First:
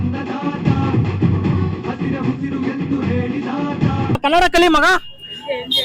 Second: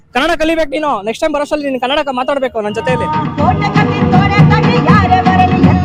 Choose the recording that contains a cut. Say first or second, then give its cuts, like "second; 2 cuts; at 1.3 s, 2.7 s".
first; 1 cut; at 4.3 s